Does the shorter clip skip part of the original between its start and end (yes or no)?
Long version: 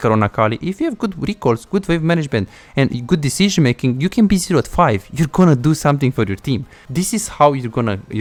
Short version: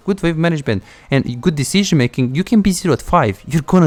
no